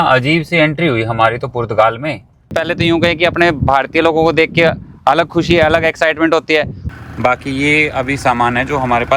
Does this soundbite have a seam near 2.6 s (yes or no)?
yes